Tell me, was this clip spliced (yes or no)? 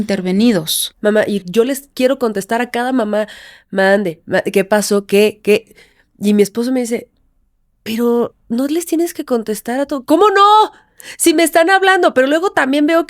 yes